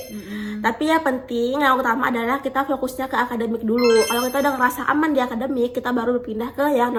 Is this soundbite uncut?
yes; 0 cuts

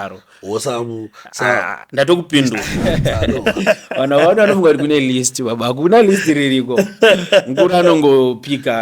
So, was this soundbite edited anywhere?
yes; 1 cut; at 2.7 s

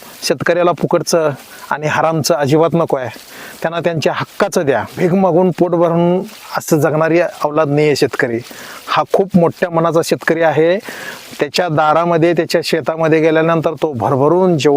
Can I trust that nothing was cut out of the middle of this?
no; 1 cut; at 4.9 s

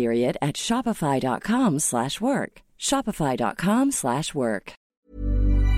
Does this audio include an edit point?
yes; 1 cut; at 4.8 s

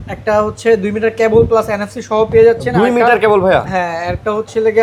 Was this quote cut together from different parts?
no; 0 cuts

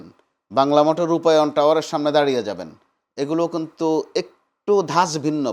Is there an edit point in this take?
no; 0 cuts

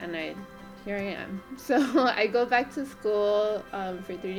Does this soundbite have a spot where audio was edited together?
no; 0 cuts

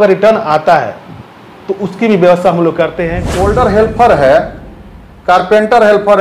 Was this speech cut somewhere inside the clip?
yes; 1 cut; at 3.2 s

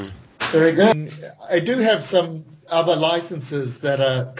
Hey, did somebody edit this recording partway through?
yes; 1 cut; at 3.2 s

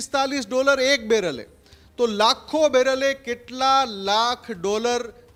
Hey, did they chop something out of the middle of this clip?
no; 0 cuts

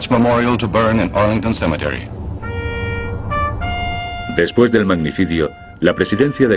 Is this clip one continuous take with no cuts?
no; 1 cut; at 3.8 s

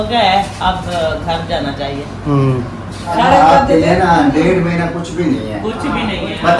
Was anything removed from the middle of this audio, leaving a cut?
yes; 1 cut; at 3.1 s

